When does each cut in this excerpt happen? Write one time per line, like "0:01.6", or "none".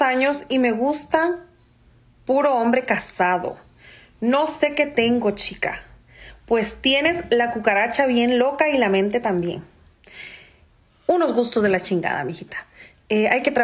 none